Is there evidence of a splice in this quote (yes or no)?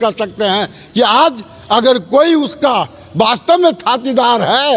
no